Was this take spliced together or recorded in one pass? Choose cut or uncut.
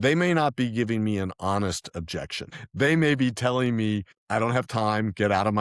cut